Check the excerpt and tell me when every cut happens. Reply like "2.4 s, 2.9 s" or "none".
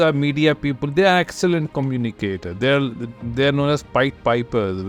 none